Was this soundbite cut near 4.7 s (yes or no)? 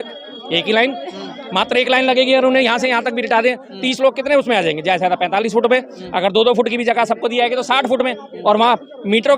no